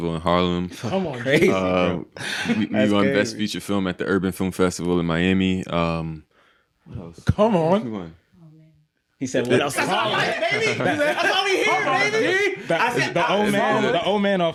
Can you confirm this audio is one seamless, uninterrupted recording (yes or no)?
yes